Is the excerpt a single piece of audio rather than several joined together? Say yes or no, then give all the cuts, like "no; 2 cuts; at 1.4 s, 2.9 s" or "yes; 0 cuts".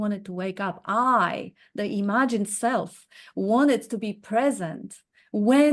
yes; 0 cuts